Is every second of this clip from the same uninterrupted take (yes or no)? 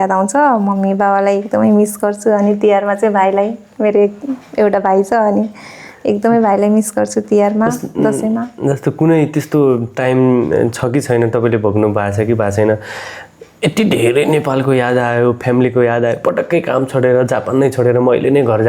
yes